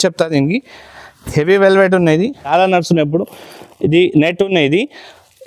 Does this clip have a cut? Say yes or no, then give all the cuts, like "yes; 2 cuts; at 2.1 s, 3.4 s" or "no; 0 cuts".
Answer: yes; 1 cut; at 2.5 s